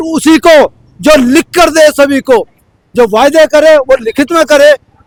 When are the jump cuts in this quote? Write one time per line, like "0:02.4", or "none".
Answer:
none